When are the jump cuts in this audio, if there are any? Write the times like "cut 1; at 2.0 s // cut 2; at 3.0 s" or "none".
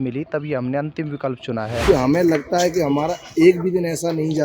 cut 1; at 1.8 s